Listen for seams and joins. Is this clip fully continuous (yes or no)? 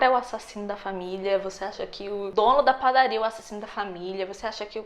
no